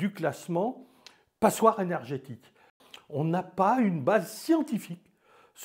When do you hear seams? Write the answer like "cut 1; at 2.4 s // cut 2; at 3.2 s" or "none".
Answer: cut 1; at 2.7 s